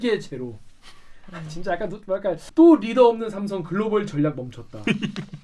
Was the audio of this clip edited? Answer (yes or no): yes